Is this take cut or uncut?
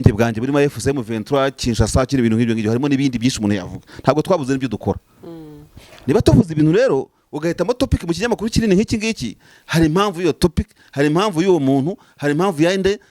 uncut